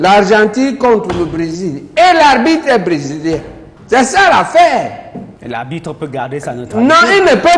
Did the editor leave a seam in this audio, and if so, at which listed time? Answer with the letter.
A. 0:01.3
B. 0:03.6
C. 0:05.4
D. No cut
D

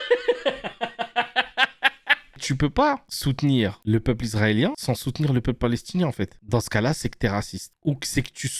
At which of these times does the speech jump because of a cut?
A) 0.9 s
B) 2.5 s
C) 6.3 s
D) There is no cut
B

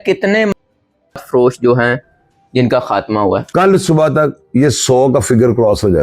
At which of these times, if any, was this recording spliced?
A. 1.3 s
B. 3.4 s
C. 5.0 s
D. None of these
B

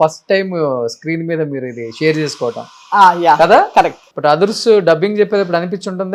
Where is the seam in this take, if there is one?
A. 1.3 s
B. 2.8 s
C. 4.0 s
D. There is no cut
C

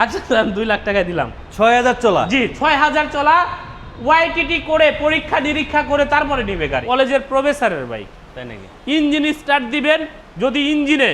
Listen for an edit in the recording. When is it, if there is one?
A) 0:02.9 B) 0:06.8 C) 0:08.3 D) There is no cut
B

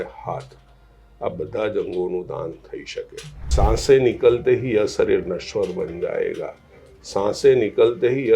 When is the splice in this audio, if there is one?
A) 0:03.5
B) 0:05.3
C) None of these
A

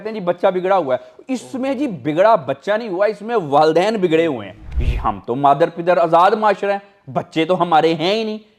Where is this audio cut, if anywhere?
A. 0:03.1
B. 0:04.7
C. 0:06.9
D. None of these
B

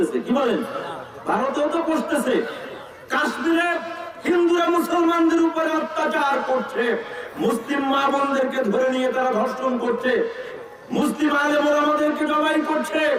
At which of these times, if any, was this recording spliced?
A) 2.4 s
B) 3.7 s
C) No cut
C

